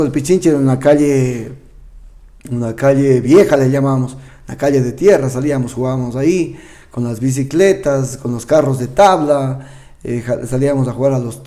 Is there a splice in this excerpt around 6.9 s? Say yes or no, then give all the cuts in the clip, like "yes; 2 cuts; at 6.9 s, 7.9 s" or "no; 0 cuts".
no; 0 cuts